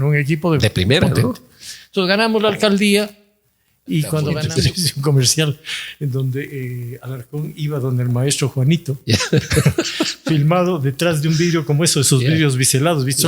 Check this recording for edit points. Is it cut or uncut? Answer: cut